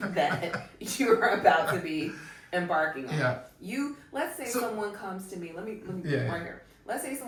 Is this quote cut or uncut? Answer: uncut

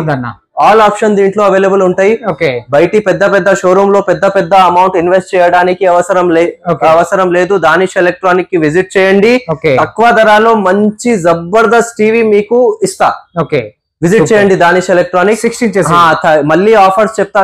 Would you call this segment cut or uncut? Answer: uncut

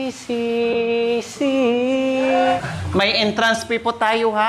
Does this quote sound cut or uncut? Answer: cut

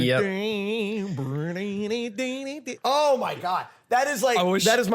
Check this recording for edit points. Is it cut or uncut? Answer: cut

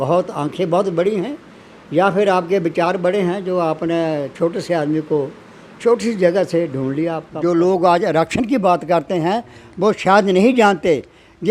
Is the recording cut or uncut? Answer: cut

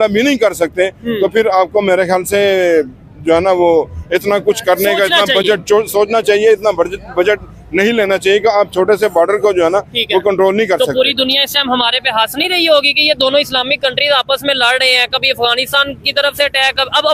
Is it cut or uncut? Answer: uncut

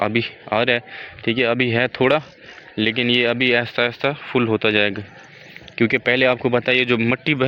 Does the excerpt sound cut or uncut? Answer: uncut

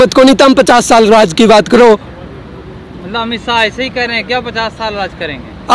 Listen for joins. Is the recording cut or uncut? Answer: uncut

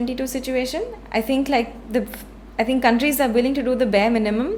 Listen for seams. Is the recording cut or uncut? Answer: uncut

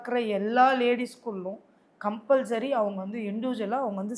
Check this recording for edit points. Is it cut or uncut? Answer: uncut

